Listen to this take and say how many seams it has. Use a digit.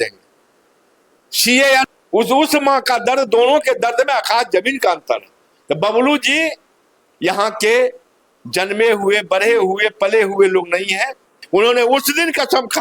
2